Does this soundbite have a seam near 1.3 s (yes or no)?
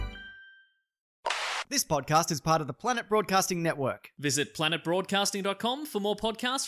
yes